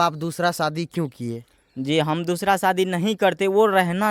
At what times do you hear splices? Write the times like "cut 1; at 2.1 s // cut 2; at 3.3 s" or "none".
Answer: none